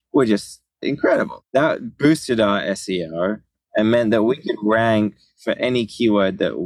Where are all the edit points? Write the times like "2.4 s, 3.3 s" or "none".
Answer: 1.4 s